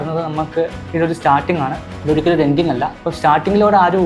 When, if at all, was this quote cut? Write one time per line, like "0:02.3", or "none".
0:01.9
0:03.0